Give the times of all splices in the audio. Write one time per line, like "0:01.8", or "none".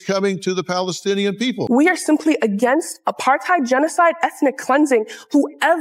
0:01.6

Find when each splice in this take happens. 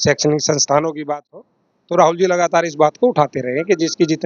0:01.0

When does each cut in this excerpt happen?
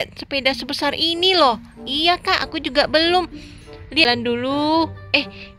0:04.0

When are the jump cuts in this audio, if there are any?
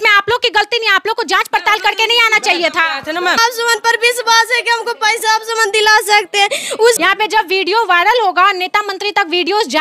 0:03.4
0:07.0

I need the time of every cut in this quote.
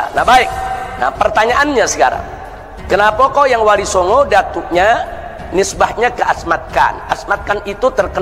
none

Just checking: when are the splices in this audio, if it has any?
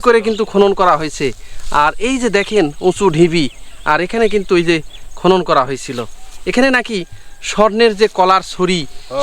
none

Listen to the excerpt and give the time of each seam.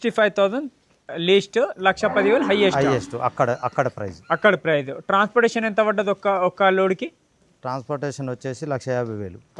none

